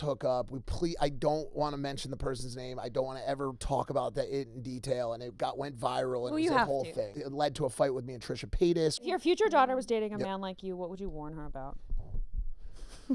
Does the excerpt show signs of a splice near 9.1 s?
yes; 2 cuts; at 7.2 s, 9.1 s

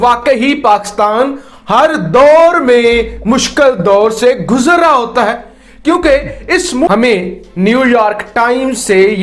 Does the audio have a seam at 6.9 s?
yes; 1 cut; at 6.9 s

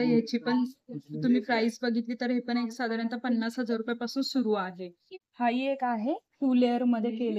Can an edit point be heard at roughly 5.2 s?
yes; 1 cut; at 5.2 s

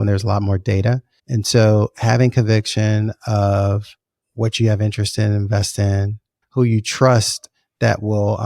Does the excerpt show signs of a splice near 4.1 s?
no; 2 cuts; at 1.2 s, 6.4 s

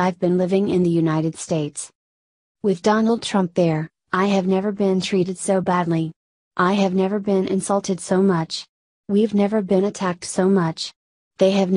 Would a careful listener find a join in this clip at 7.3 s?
no; 1 cut; at 2.1 s

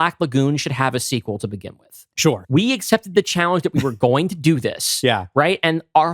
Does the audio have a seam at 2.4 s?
yes; 1 cut; at 2.4 s

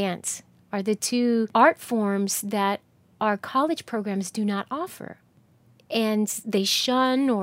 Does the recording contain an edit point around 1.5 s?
yes; 1 cut; at 1.5 s

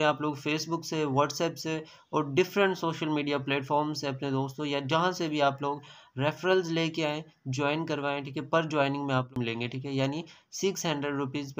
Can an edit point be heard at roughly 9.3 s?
yes; 1 cut; at 9.3 s

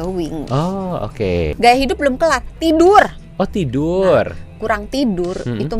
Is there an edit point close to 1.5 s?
yes; 1 cut; at 1.5 s

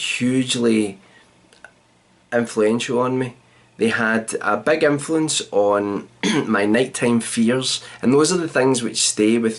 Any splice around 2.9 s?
yes; 1 cut; at 2.9 s

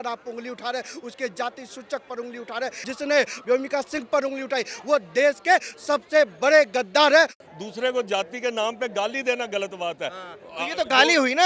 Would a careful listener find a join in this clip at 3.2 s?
yes; 2 cuts; at 3.2 s, 7.4 s

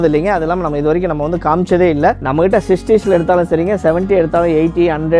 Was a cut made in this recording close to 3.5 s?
no; 1 cut; at 2.2 s

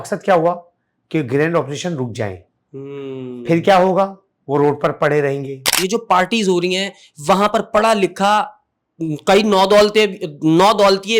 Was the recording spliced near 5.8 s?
yes; 1 cut; at 5.8 s

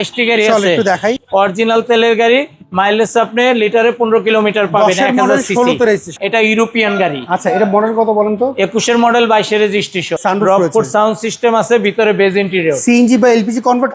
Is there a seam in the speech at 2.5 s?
no; 3 cuts; at 1.2 s, 6.2 s, 10.1 s

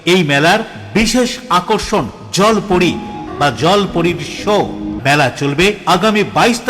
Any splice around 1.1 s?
no; 2 cuts; at 3.3 s, 4.9 s

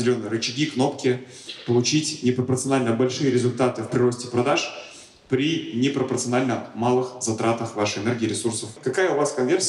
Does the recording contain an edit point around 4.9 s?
no; 1 cut; at 8.7 s

